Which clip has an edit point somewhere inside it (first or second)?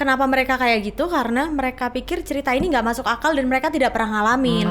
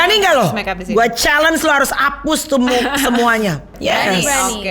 second